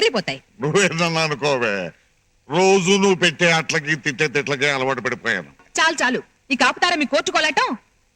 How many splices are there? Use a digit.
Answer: 1